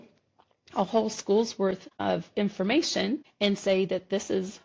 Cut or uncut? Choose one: cut